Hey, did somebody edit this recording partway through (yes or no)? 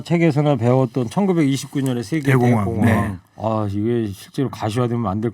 yes